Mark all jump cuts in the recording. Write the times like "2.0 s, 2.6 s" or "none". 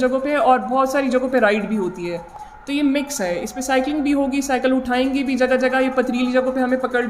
none